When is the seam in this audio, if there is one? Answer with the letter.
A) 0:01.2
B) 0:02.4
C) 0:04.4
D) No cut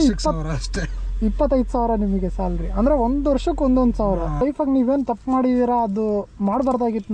C